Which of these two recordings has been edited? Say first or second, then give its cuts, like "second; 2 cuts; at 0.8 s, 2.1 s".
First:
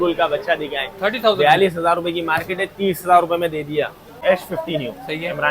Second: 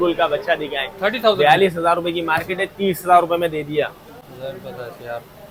first; 1 cut; at 4.2 s